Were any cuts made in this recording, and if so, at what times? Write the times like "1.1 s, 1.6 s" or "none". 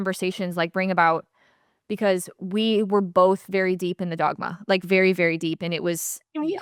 none